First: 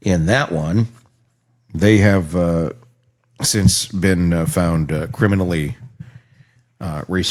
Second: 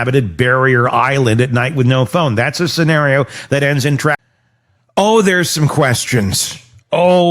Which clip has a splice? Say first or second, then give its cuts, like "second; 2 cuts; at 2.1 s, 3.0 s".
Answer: second; 1 cut; at 4.2 s